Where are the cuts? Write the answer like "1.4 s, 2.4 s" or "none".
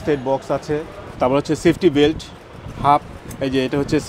1.0 s